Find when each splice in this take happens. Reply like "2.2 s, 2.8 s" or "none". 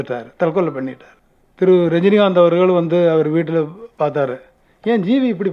1.1 s